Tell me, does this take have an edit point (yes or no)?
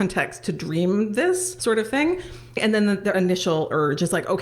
yes